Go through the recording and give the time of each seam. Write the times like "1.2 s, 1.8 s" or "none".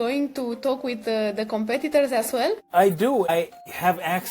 2.6 s, 3.3 s